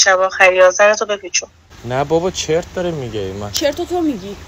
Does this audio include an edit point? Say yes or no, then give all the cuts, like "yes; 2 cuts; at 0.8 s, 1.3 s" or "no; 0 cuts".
yes; 1 cut; at 1.7 s